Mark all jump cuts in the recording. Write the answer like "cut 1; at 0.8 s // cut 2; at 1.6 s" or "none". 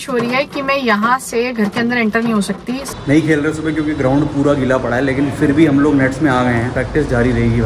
cut 1; at 3.0 s // cut 2; at 6.7 s